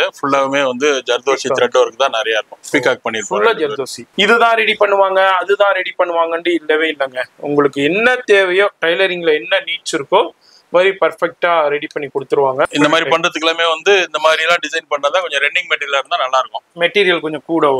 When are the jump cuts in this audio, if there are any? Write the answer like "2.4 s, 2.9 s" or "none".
4.0 s, 12.6 s